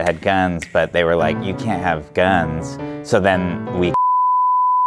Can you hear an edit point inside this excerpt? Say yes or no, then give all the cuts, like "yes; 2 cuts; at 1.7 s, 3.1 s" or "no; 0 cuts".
no; 0 cuts